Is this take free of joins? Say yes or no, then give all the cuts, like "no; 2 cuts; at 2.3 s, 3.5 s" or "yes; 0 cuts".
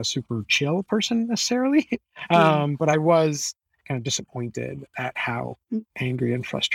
yes; 0 cuts